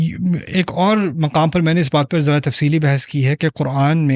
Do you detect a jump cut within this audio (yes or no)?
no